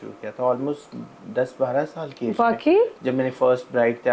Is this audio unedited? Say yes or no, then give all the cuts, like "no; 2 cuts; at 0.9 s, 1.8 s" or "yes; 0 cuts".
no; 1 cut; at 3.0 s